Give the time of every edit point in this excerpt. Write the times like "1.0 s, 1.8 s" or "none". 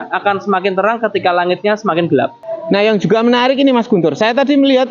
2.4 s